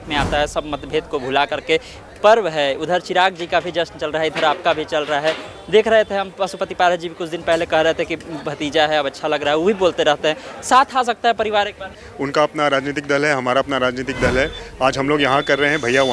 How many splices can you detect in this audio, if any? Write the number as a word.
two